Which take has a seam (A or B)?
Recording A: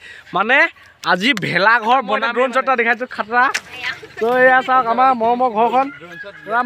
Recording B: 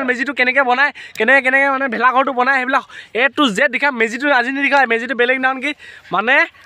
A